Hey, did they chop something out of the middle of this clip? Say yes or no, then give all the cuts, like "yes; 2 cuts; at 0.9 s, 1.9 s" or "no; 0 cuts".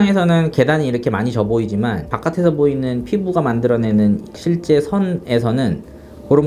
no; 0 cuts